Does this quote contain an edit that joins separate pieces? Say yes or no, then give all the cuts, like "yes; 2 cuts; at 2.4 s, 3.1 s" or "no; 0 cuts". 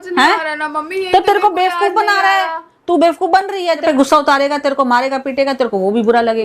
yes; 1 cut; at 3.8 s